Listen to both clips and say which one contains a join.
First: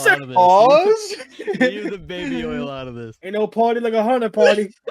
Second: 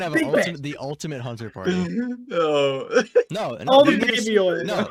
first; 1 cut; at 3.1 s

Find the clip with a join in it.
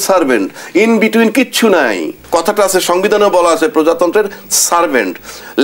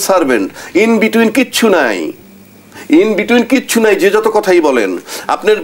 first; 1 cut; at 2.2 s

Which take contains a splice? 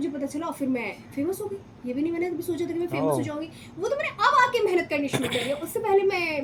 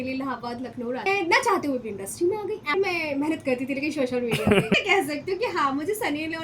second; 3 cuts; at 1.0 s, 2.7 s, 4.7 s

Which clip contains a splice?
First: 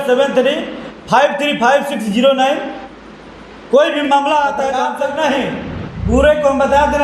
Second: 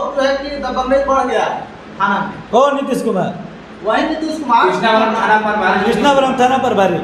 first; 1 cut; at 4.8 s

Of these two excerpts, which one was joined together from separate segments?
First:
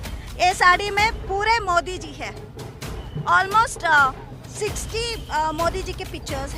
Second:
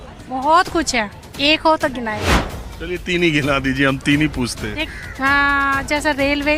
second; 2 cuts; at 2.6 s, 4.9 s

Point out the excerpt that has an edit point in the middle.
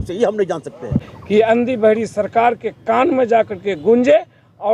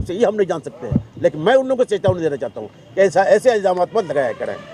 first; 1 cut; at 1.1 s

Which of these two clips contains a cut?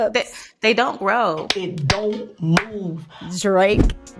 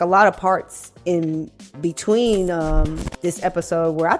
first; 2 cuts; at 1.5 s, 3.1 s

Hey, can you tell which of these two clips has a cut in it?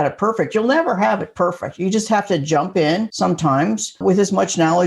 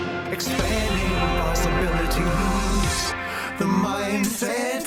first; 2 cuts; at 3.1 s, 4.0 s

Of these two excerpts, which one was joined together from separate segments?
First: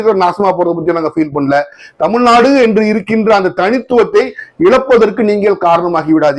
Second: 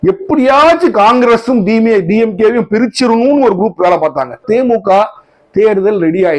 second; 1 cut; at 4.4 s

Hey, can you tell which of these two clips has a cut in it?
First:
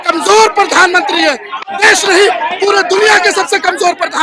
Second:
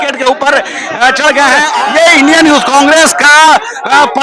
second; 1 cut; at 1.7 s

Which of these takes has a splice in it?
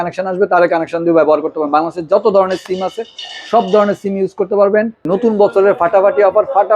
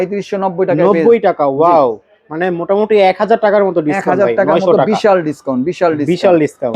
first; 1 cut; at 5.0 s

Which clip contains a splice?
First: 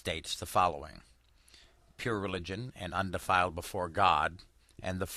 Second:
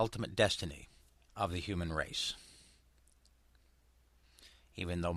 second; 1 cut; at 3.9 s

